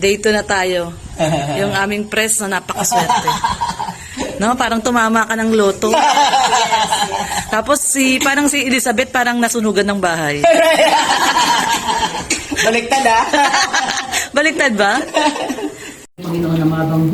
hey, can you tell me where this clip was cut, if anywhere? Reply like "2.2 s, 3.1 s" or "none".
15.9 s